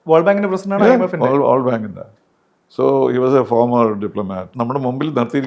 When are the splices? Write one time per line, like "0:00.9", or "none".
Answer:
0:04.5